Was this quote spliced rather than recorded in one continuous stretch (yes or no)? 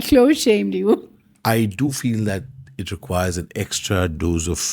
yes